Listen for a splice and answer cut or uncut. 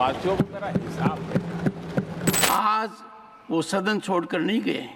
cut